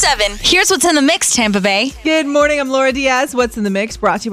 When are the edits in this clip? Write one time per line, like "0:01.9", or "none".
0:01.9